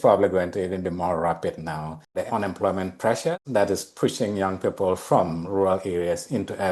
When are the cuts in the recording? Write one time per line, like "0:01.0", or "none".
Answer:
0:02.3
0:03.4